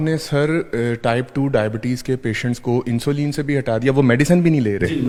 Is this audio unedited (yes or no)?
yes